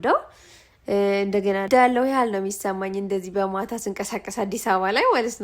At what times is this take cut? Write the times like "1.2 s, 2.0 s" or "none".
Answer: 1.7 s